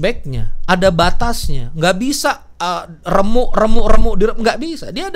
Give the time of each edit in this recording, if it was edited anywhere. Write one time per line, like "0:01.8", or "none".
none